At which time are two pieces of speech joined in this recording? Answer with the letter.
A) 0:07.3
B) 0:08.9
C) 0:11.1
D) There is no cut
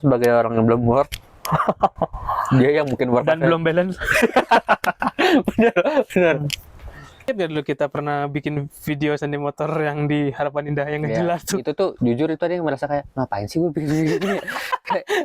A